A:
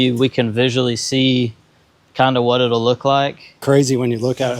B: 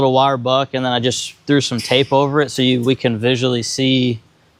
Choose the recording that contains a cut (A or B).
A